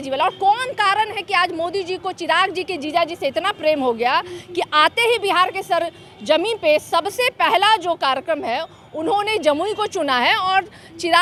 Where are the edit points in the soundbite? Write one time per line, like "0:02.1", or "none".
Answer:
none